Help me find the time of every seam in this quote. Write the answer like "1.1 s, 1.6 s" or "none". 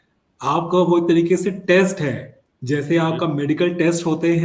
none

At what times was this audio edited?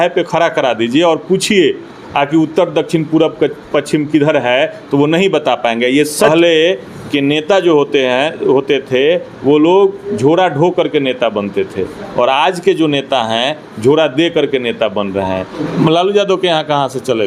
6.3 s, 15.7 s

